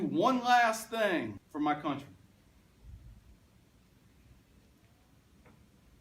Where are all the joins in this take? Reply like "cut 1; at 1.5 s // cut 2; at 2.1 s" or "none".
cut 1; at 1.4 s